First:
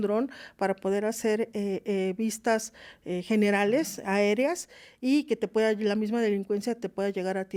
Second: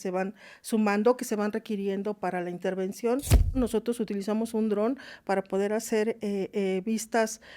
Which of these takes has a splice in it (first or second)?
second